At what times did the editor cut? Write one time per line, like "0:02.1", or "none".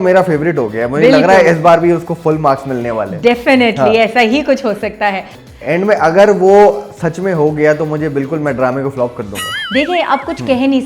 0:05.3